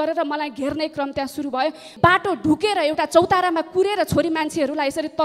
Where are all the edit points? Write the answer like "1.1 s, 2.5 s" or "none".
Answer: 1.9 s

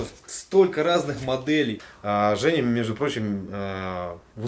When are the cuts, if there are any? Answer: 1.9 s

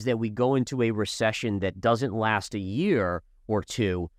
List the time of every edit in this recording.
none

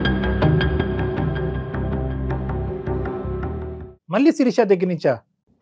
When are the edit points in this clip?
none

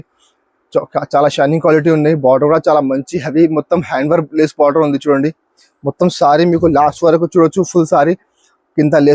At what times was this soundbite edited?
none

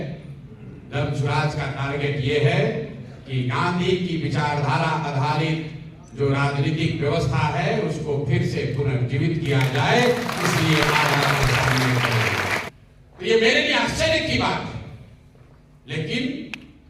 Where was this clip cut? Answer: 12.7 s

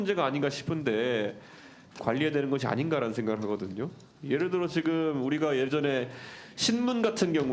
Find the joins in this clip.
2.0 s

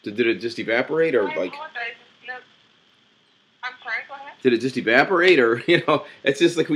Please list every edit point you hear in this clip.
none

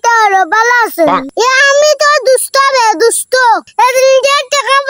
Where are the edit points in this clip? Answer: 1.3 s

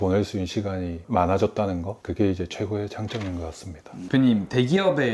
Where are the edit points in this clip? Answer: 3.9 s

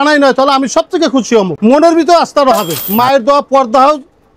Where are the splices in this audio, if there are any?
1.5 s, 2.8 s

